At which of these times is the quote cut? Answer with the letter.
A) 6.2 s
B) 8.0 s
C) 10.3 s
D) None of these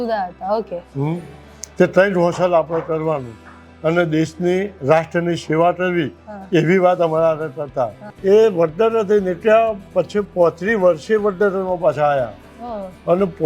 B